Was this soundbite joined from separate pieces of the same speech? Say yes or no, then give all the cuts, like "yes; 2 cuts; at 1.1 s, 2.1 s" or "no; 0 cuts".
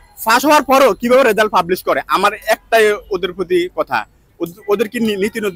no; 0 cuts